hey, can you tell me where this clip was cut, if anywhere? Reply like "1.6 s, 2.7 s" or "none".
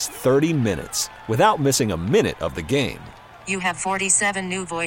none